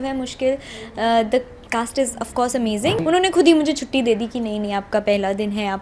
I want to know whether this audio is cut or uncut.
cut